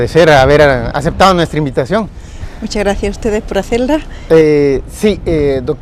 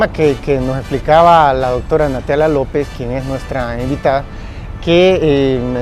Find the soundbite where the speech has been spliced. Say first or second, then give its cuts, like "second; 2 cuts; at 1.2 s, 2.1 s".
second; 1 cut; at 3.9 s